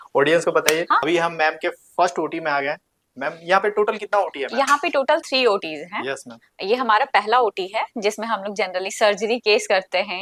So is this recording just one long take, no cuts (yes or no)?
yes